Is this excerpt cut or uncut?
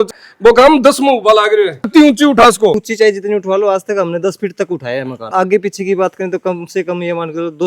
cut